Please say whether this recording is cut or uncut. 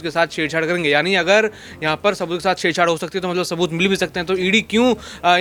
uncut